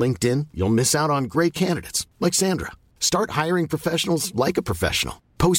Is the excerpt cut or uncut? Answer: uncut